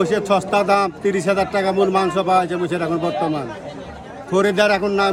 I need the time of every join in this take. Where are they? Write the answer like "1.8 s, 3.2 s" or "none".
none